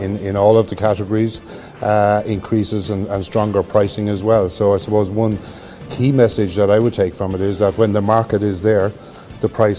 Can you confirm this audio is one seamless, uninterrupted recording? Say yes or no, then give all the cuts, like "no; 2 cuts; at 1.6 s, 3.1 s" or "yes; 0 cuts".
yes; 0 cuts